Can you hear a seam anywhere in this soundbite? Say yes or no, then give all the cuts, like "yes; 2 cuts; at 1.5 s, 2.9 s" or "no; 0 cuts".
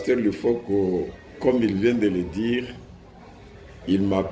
yes; 1 cut; at 1.2 s